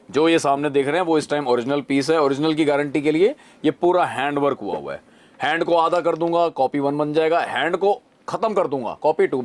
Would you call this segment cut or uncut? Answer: uncut